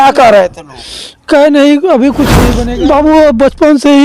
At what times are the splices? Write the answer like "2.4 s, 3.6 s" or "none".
2.3 s